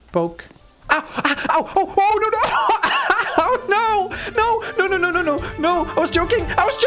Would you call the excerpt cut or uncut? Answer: uncut